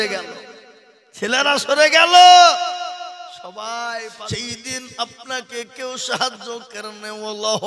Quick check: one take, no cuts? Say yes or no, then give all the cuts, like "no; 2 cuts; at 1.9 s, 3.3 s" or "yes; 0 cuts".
no; 1 cut; at 4.4 s